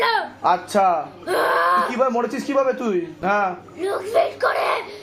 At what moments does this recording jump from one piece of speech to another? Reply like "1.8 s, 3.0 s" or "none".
3.2 s